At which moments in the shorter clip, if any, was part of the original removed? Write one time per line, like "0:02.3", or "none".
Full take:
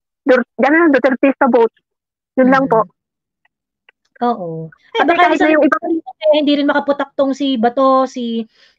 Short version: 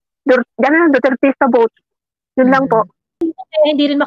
0:03.1